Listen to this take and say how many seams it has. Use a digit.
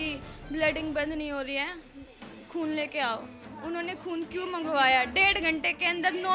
1